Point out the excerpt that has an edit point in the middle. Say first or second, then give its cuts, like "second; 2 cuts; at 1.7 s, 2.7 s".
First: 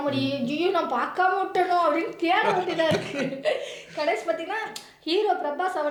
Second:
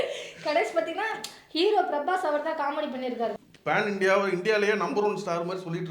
second; 1 cut; at 3.4 s